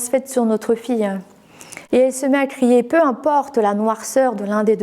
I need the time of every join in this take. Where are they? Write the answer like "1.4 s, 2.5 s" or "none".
1.7 s